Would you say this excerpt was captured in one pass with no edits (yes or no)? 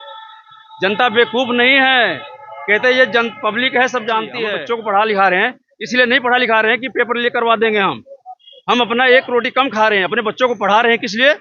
no